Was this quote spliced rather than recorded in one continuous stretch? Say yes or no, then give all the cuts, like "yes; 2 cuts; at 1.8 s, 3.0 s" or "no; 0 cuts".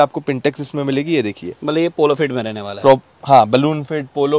no; 0 cuts